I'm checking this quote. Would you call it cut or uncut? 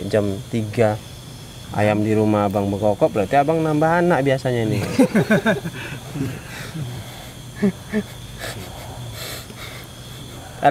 uncut